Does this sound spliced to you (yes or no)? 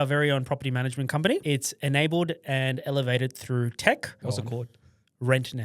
yes